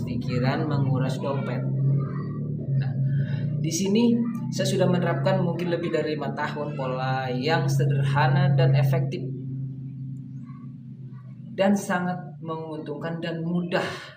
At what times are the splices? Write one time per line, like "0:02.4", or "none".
none